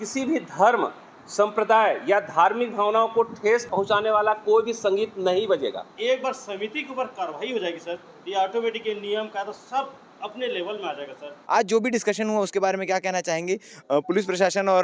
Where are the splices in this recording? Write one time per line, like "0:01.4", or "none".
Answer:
0:03.6
0:05.9
0:11.3